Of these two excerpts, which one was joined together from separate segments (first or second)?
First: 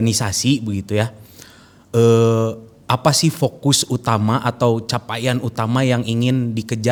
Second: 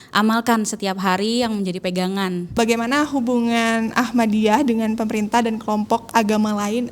second